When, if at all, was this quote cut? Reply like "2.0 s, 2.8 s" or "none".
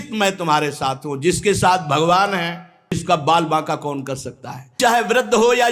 3.0 s, 4.8 s